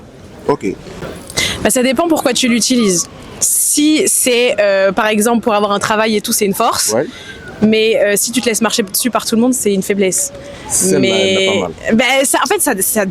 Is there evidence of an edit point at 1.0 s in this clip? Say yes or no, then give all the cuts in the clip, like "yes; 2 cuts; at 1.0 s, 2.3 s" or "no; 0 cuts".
yes; 1 cut; at 1.0 s